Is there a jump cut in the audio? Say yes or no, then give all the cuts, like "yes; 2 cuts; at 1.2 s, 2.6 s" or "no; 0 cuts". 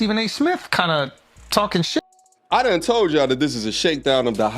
yes; 1 cut; at 2.1 s